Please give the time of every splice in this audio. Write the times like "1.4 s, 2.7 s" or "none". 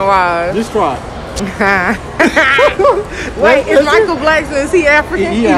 1.2 s